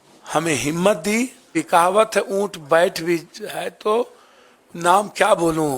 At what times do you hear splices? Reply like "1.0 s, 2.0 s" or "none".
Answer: 1.5 s